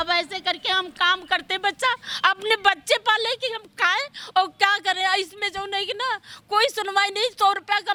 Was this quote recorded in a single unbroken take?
yes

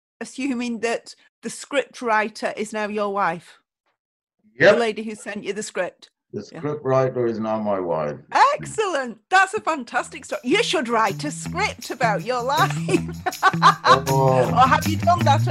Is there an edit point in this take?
no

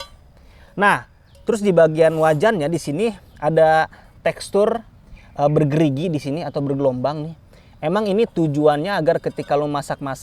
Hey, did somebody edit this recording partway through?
no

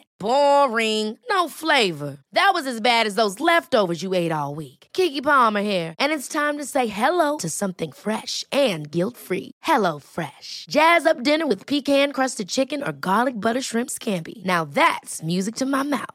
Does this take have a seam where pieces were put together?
no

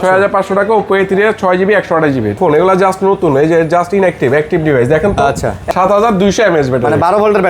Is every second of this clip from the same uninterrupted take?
no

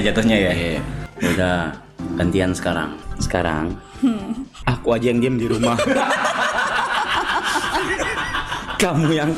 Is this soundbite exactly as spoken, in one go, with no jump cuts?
no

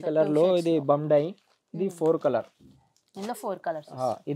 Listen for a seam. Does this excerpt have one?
no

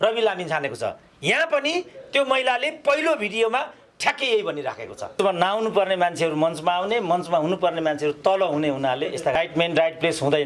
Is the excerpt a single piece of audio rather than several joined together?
no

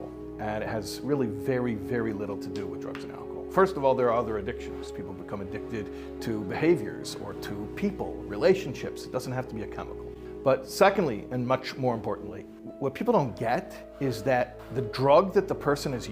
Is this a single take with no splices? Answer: no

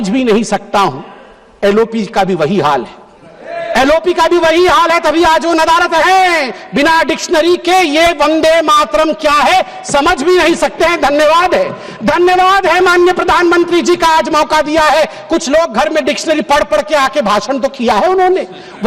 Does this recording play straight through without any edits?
yes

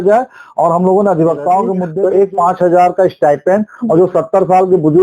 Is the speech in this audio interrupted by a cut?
yes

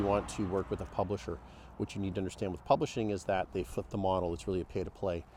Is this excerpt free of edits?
yes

